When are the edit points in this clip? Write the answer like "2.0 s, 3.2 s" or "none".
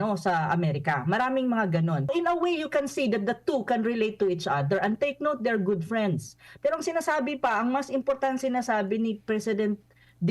2.1 s